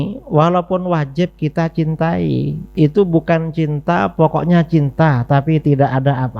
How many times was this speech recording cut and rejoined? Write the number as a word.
one